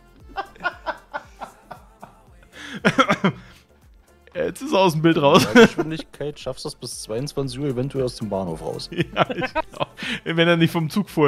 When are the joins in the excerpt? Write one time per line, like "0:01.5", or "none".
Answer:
none

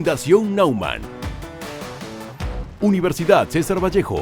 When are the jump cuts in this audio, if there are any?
0:02.7

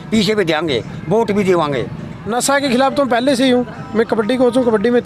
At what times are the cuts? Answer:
0:02.2

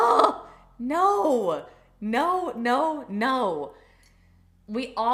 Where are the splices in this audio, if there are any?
none

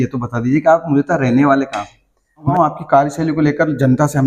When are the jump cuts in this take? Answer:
0:02.5

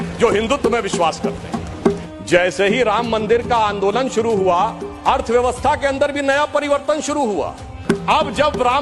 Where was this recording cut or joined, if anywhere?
0:02.0
0:07.7

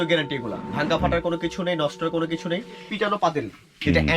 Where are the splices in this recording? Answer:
0:02.9

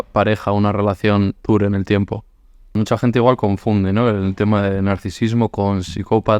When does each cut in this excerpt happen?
0:02.8

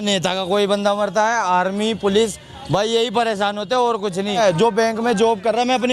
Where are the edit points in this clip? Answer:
0:04.4

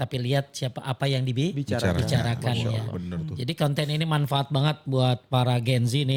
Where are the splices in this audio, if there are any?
none

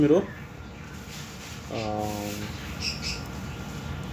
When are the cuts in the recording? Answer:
none

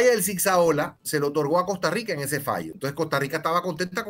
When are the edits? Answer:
0:01.0
0:02.7

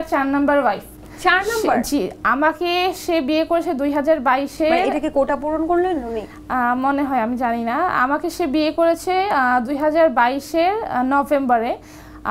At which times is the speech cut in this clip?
none

